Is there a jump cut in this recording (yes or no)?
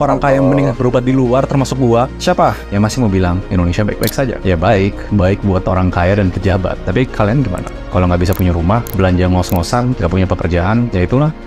no